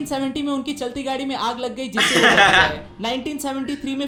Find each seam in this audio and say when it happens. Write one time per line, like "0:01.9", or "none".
none